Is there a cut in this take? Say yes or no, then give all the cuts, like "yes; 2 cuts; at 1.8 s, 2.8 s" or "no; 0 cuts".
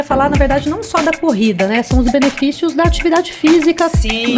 no; 0 cuts